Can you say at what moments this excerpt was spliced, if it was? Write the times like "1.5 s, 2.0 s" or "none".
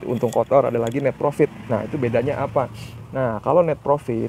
none

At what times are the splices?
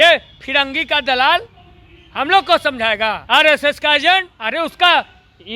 3.2 s, 4.4 s

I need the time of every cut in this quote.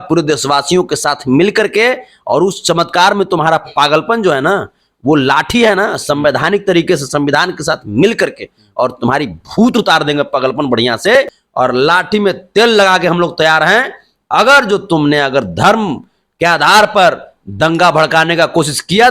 11.4 s

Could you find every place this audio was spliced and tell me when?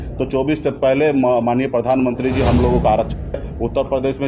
3.3 s

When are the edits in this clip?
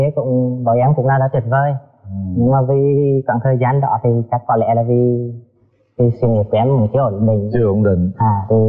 none

